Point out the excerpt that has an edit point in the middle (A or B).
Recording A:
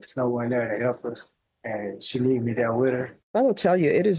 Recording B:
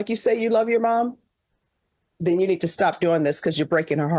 A